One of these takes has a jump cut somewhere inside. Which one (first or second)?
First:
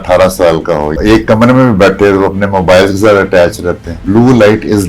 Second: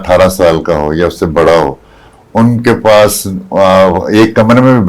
first